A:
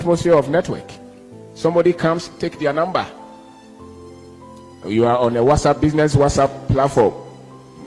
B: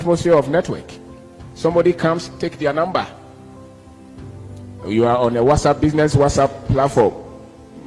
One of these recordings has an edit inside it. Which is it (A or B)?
A